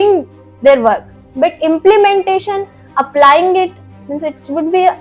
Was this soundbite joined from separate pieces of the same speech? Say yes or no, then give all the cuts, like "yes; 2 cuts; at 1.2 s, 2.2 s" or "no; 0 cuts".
no; 0 cuts